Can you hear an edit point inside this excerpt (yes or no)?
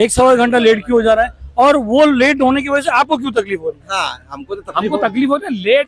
no